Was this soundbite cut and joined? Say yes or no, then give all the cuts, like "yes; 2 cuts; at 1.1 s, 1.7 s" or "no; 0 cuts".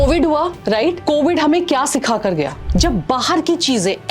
yes; 2 cuts; at 1.0 s, 2.6 s